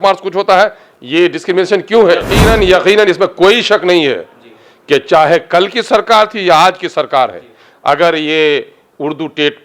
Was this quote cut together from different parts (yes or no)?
yes